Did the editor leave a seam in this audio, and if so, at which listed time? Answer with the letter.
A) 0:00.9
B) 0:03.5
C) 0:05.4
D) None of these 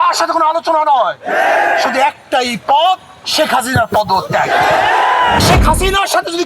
C